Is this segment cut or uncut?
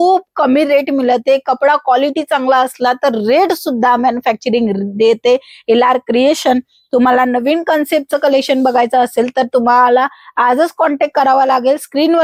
uncut